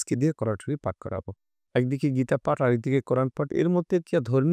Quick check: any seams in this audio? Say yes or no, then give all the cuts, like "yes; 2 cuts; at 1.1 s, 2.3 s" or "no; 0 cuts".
no; 0 cuts